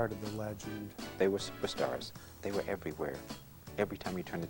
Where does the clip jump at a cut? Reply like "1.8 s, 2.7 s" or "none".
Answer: 1.0 s, 2.3 s